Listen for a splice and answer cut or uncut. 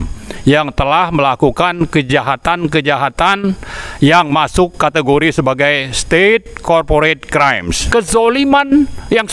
cut